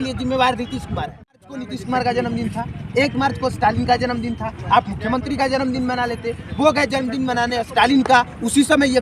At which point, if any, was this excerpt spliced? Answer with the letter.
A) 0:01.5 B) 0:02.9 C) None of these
A